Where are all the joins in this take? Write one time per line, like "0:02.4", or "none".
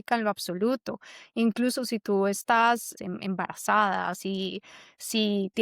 0:02.9